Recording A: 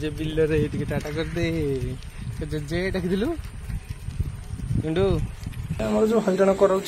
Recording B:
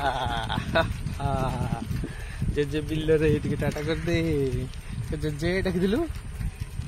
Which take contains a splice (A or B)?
A